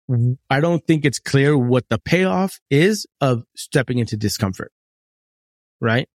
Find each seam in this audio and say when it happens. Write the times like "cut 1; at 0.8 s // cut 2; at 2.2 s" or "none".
cut 1; at 2.0 s